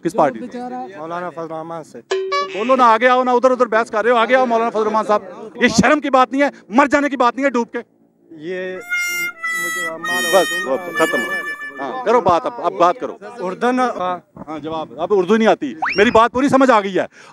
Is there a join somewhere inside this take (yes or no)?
yes